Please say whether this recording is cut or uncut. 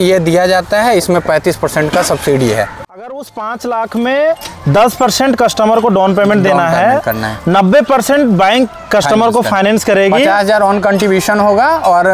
cut